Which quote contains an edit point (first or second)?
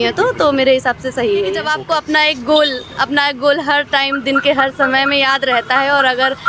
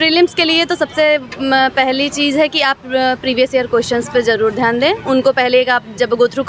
first